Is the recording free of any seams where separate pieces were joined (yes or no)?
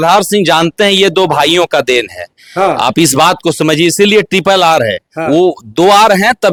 yes